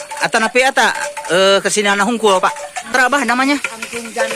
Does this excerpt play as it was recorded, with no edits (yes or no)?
no